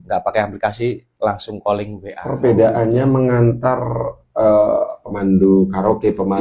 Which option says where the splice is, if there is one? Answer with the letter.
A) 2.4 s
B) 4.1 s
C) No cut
A